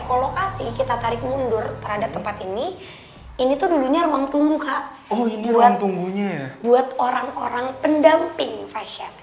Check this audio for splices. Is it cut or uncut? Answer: uncut